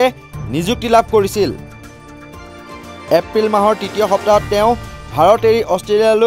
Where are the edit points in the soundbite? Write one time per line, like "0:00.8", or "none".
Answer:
none